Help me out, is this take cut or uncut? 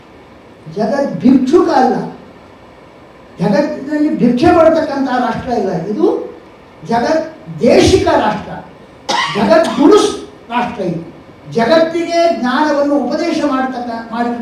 uncut